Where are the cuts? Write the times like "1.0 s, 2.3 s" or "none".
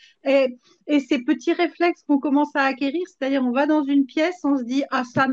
none